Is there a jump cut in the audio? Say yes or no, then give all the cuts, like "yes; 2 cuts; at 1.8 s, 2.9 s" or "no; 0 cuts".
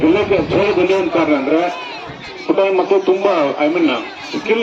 no; 0 cuts